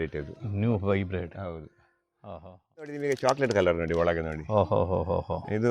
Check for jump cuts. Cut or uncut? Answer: cut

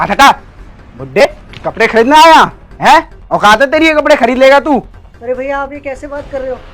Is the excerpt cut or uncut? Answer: cut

